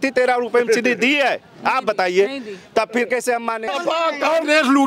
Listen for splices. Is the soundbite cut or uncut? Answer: cut